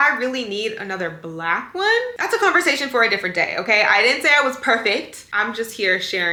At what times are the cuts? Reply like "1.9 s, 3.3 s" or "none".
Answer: none